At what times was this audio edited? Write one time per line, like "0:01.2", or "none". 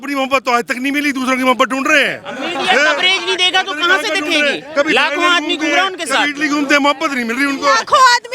none